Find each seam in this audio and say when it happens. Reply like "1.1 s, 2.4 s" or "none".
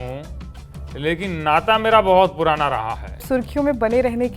3.2 s